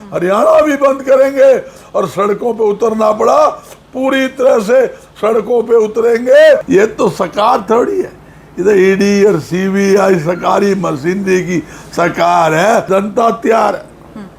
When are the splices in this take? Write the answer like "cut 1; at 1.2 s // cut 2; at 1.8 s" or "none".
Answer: cut 1; at 6.6 s // cut 2; at 12.9 s